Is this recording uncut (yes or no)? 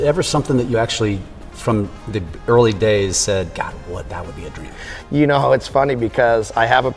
yes